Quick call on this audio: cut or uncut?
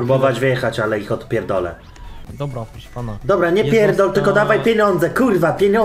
cut